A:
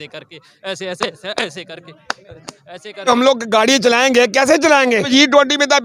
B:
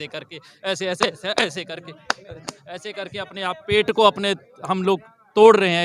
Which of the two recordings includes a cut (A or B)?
A